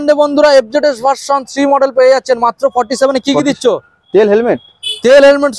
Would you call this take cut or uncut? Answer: uncut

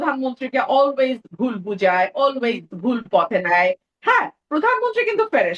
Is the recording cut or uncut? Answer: uncut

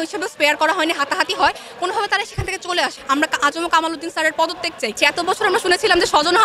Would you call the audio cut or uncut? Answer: cut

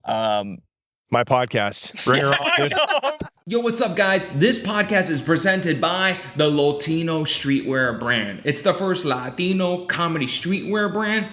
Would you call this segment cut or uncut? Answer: cut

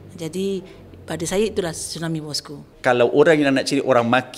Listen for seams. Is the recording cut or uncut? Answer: cut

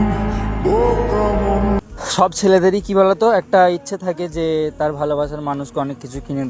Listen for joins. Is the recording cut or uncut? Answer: cut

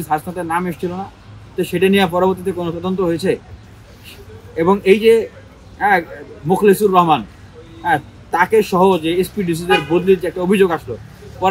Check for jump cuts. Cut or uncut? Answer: uncut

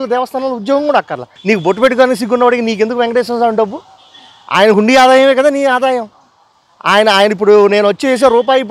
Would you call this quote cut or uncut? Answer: cut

